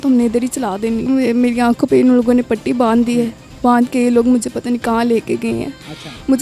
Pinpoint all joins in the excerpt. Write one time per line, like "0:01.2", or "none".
0:01.1